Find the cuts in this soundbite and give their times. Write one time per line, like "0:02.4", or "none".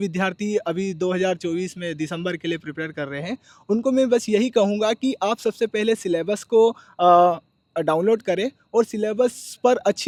none